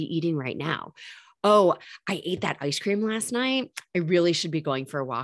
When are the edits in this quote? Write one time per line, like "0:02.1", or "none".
none